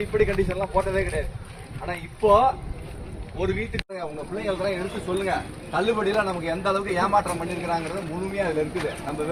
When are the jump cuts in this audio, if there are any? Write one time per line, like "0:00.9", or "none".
none